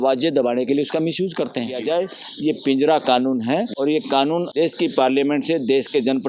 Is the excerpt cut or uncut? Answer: cut